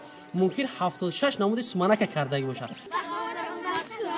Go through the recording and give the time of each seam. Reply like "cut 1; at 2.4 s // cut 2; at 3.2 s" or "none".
cut 1; at 2.8 s